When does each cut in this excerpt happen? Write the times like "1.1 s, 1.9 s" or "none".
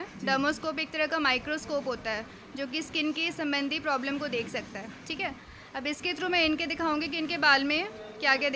none